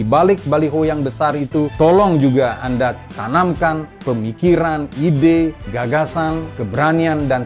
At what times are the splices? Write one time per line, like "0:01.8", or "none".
0:01.7
0:03.1
0:03.9
0:05.6
0:06.6